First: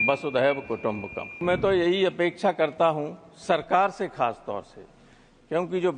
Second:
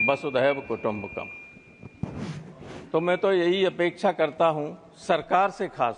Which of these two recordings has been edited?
first; 1 cut; at 1.4 s

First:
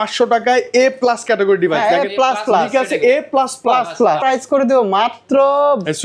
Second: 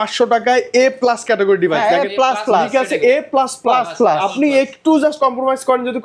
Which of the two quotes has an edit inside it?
first; 1 cut; at 4.2 s

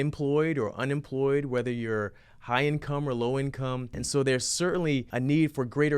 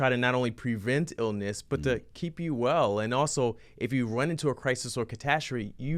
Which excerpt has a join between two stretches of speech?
first; 2 cuts; at 4.0 s, 5.1 s

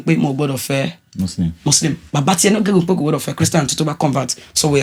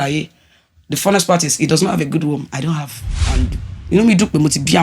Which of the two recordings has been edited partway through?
second; 1 cut; at 3.2 s

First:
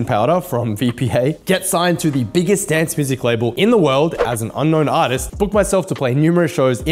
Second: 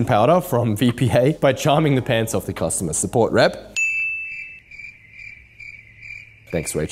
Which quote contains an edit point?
first; 3 cuts; at 1.4 s, 3.5 s, 5.3 s

